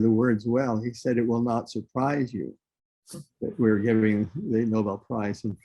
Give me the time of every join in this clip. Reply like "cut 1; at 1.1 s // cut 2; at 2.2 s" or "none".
none

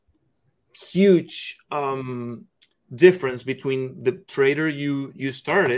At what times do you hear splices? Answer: none

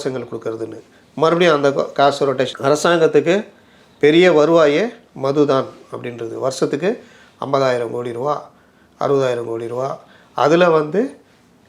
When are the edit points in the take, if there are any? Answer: cut 1; at 2.5 s

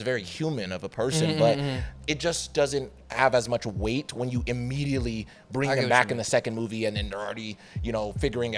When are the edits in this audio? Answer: cut 1; at 1.8 s

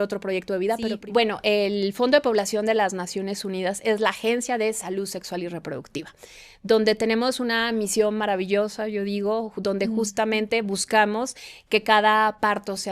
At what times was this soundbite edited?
cut 1; at 0.9 s

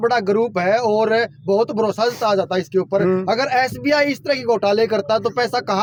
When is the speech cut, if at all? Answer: none

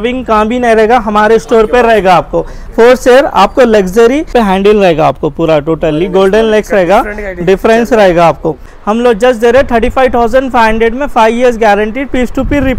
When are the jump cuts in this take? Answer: cut 1; at 4.3 s // cut 2; at 8.7 s

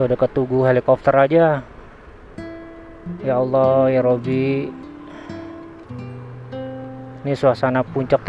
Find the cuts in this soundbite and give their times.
cut 1; at 4.7 s // cut 2; at 7.1 s

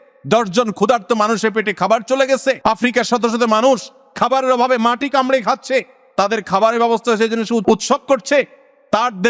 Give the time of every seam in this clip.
cut 1; at 2.6 s // cut 2; at 7.6 s

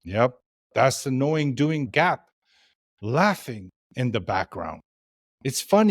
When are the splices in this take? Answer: cut 1; at 1.9 s

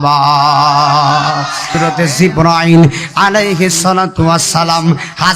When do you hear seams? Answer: cut 1; at 1.8 s

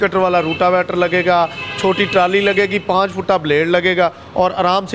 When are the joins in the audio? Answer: none

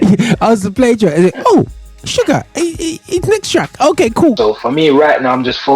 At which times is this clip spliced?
cut 1; at 4.4 s

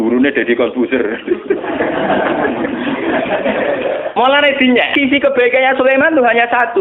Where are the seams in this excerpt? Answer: cut 1; at 4.9 s

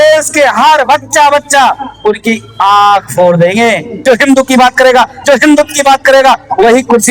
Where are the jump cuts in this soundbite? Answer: cut 1; at 3.9 s

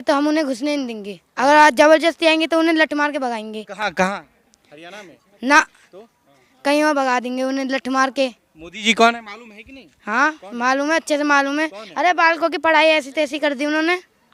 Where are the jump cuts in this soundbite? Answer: none

